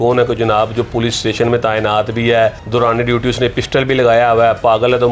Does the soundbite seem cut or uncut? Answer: cut